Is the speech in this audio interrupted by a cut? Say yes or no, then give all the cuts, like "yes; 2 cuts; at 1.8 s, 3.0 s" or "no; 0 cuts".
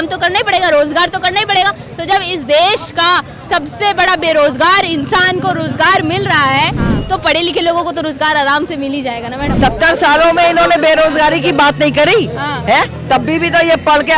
yes; 1 cut; at 9.6 s